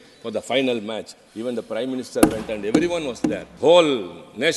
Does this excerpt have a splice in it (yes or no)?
yes